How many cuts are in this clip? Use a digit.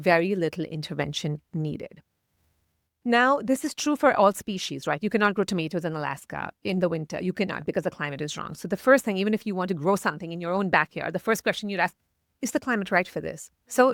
0